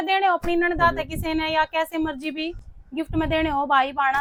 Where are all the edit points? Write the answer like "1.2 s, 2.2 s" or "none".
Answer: none